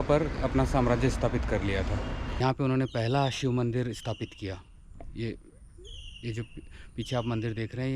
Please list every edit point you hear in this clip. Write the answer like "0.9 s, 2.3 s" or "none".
2.4 s

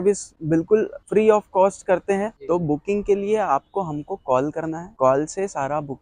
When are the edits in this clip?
1.0 s, 2.3 s

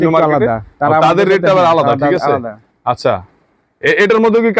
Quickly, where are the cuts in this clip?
none

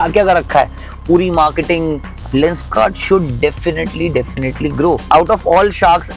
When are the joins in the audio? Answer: 2.1 s, 5.0 s

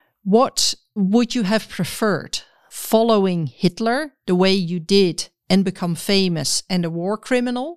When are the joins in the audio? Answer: 1.0 s

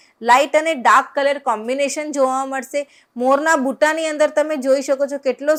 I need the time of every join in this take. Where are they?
none

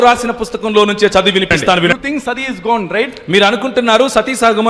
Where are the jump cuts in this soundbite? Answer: 1.9 s

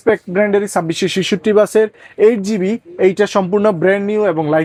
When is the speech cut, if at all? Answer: none

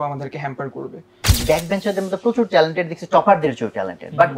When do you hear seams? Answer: 1.3 s

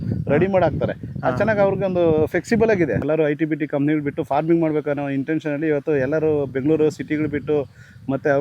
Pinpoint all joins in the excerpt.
3.0 s

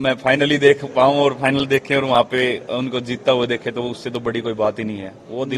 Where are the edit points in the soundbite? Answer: none

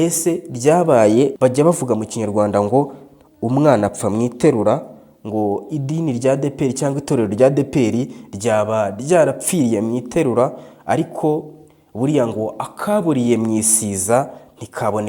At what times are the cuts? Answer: 1.3 s

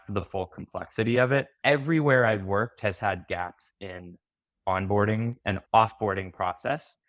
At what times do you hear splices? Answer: 1.6 s

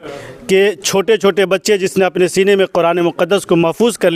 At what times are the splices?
none

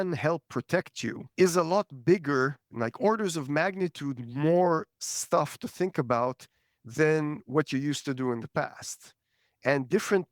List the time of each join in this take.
1.2 s, 2.6 s

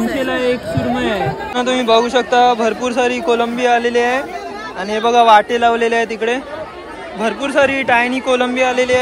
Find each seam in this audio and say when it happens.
1.4 s

